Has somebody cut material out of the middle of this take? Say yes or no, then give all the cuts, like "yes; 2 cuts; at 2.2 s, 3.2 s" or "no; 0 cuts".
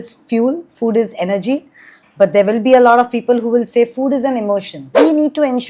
yes; 1 cut; at 4.8 s